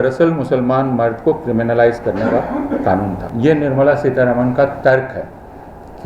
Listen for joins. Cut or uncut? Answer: cut